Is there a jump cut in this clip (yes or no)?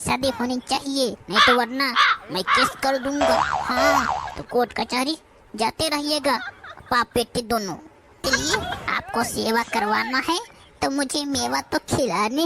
yes